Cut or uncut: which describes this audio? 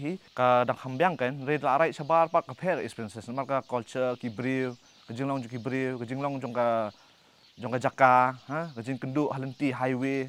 uncut